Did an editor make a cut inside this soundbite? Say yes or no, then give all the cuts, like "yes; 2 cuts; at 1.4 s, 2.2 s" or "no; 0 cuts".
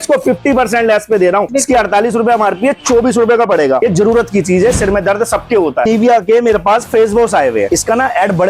yes; 4 cuts; at 1.5 s, 3.8 s, 5.9 s, 7.7 s